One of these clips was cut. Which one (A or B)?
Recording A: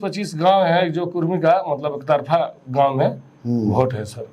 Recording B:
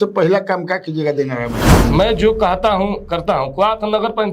B